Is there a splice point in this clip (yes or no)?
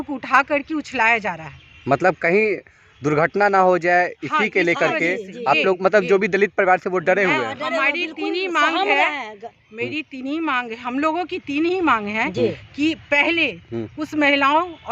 no